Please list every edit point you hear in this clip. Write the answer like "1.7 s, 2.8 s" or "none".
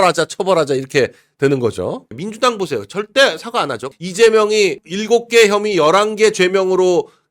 2.2 s, 3.9 s, 4.8 s